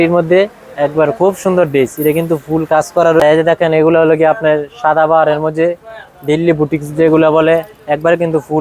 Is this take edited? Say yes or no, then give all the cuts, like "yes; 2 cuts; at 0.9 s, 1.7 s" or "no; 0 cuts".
yes; 1 cut; at 3.2 s